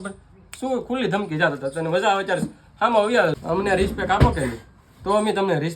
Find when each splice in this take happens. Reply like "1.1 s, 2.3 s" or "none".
3.4 s